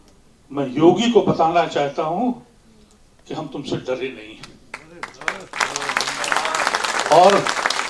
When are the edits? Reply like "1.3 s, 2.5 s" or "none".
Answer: none